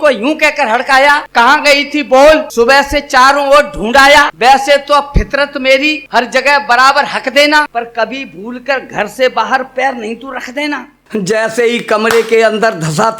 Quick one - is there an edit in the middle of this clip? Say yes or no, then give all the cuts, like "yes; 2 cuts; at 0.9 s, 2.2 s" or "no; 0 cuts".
yes; 6 cuts; at 1.2 s, 2.5 s, 4.3 s, 6.0 s, 7.7 s, 11.1 s